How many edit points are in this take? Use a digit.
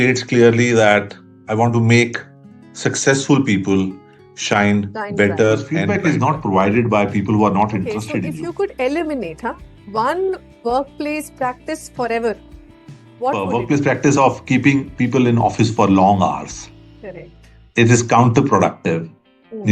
3